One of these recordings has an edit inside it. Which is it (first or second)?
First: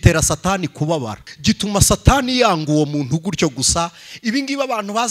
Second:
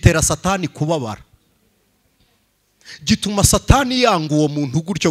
first